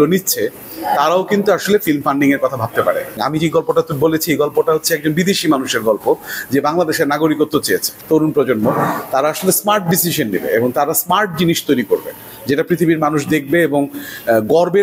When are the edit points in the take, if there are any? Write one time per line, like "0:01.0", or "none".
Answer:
0:03.2
0:07.9